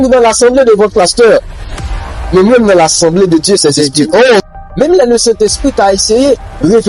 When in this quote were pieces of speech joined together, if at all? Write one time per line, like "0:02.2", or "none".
0:04.4